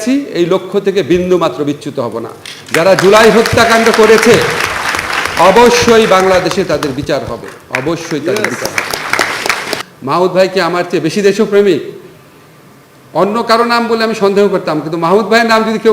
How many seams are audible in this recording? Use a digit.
1